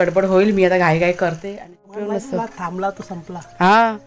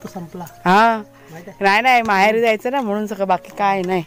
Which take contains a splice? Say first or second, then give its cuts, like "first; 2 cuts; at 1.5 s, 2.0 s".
first; 1 cut; at 2.0 s